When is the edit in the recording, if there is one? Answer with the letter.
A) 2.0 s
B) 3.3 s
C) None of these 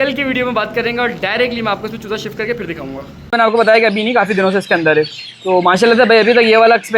B